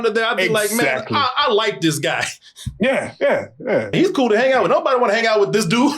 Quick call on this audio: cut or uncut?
cut